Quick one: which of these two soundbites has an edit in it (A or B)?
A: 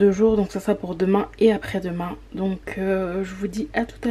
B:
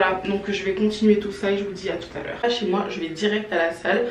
B